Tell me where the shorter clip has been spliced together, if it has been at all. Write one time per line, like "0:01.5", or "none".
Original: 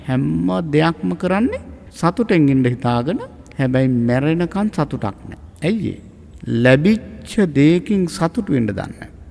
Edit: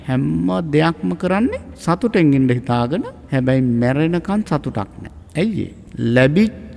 0:01.7
0:03.2
0:05.8